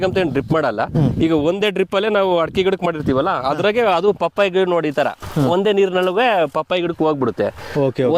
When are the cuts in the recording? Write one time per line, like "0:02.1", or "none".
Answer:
none